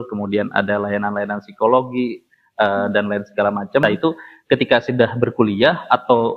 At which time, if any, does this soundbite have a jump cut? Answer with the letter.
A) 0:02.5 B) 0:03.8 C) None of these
B